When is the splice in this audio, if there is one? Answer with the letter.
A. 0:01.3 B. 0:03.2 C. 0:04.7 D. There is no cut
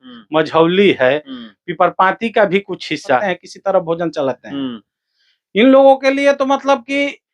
B